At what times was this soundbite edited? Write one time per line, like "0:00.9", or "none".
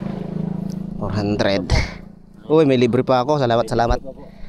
none